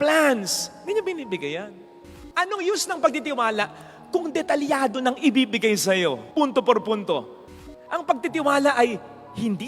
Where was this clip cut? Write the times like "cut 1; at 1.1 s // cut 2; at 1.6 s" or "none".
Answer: cut 1; at 2.1 s // cut 2; at 7.5 s

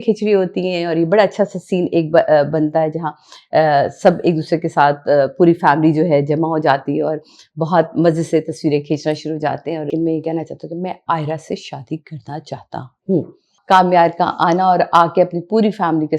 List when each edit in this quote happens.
cut 1; at 9.9 s // cut 2; at 13.5 s

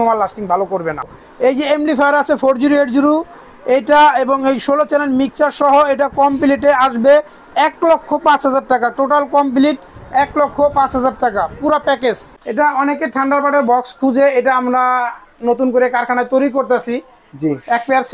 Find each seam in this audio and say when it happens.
cut 1; at 1.1 s // cut 2; at 12.3 s

